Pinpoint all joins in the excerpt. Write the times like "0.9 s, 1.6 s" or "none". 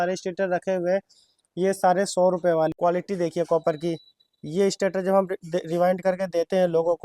2.7 s